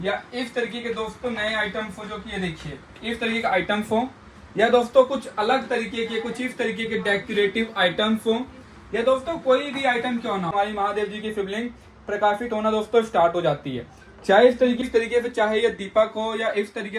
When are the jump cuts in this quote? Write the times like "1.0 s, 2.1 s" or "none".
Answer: 10.5 s, 14.8 s